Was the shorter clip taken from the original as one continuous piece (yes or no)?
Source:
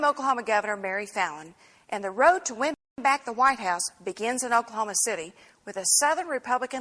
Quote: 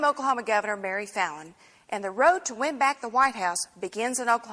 no